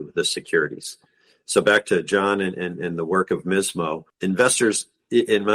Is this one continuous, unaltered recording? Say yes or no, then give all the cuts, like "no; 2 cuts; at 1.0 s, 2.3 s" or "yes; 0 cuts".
no; 1 cut; at 4.1 s